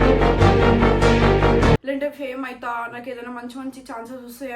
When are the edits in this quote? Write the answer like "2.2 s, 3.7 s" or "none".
1.8 s